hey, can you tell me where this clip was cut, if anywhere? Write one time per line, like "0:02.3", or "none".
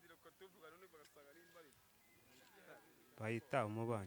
none